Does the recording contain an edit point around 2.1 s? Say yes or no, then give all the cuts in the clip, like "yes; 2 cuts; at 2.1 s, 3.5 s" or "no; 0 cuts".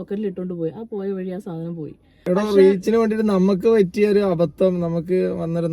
yes; 1 cut; at 2.1 s